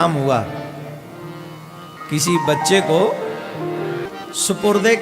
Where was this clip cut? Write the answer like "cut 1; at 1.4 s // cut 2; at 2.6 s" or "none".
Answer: cut 1; at 1.9 s // cut 2; at 4.0 s